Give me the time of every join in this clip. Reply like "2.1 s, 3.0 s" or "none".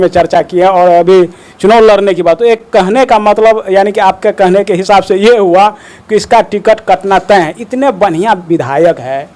none